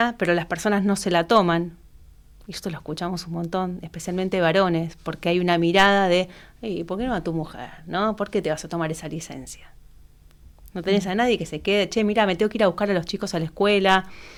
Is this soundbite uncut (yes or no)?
yes